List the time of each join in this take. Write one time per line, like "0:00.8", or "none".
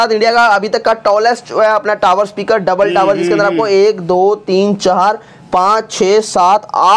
none